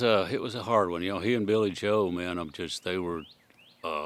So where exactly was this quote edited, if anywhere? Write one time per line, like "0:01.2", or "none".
none